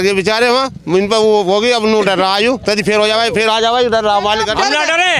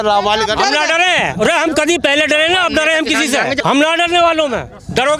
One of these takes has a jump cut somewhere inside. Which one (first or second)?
second